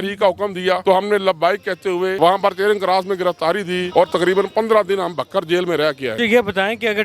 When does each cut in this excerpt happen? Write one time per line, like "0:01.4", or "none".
0:00.8
0:02.1
0:03.9
0:06.2